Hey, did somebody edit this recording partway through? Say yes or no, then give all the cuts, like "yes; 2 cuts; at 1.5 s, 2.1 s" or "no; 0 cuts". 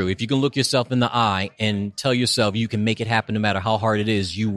no; 0 cuts